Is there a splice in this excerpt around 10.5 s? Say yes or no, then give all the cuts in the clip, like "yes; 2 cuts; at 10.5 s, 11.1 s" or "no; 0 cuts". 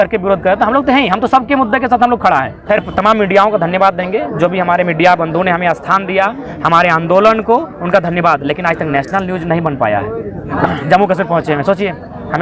yes; 2 cuts; at 2.6 s, 10.5 s